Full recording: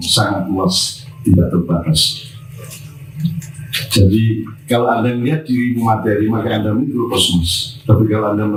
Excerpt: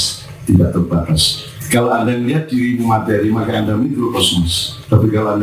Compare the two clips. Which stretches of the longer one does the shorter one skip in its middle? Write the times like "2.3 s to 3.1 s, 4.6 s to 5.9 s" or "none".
2.3 s to 4.5 s